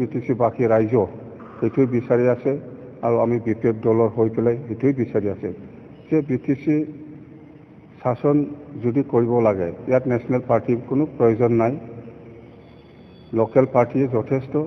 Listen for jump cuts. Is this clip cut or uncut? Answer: uncut